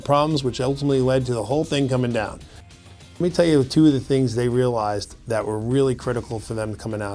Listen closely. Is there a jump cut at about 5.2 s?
no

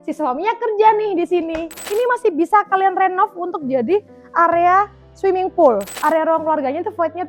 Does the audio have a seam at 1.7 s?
yes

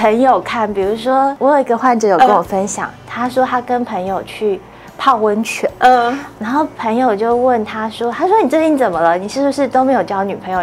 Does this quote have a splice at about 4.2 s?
no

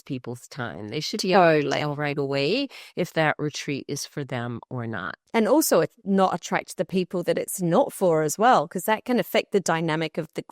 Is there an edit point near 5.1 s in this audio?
yes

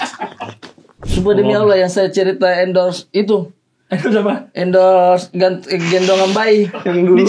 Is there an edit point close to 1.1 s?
yes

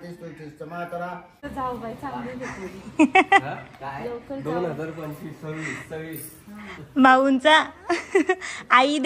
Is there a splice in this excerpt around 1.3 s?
yes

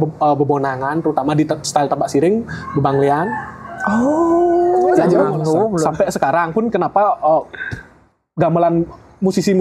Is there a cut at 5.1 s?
yes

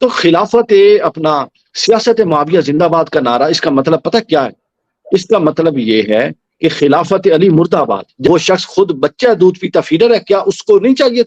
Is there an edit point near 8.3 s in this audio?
yes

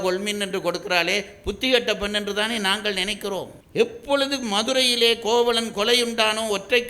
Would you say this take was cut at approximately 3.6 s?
yes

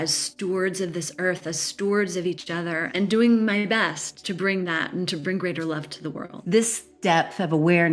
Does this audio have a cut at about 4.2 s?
yes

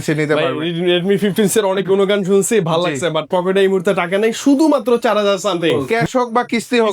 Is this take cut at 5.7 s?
yes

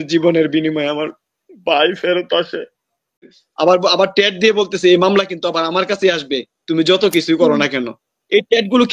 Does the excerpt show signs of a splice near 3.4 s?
yes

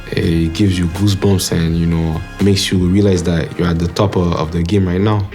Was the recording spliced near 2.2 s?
yes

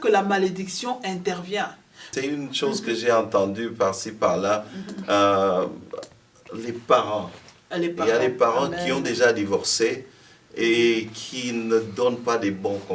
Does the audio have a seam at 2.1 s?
yes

